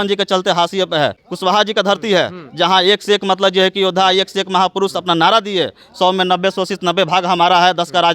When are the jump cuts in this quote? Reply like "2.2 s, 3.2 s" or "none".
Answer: 1.2 s